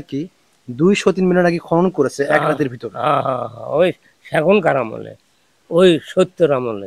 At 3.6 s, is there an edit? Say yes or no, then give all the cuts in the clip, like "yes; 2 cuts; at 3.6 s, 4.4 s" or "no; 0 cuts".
no; 0 cuts